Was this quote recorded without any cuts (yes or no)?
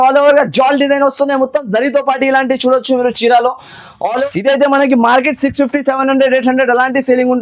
no